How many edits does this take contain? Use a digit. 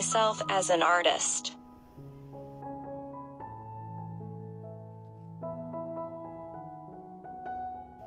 0